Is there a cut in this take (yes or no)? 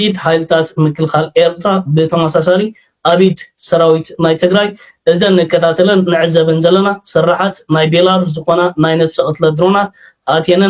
no